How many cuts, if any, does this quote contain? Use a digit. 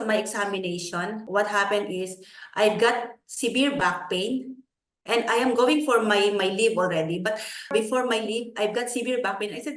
0